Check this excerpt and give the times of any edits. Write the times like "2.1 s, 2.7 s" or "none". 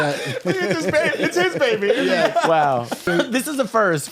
3.1 s